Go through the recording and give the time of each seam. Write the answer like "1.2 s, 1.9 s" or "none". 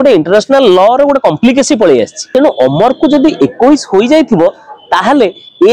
2.2 s